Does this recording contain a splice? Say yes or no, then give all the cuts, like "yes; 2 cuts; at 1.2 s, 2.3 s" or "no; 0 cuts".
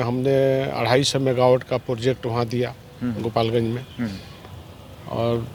no; 0 cuts